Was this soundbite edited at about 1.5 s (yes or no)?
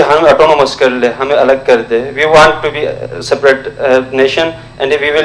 no